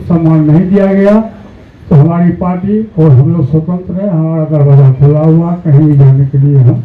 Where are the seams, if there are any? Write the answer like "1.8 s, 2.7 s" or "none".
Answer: none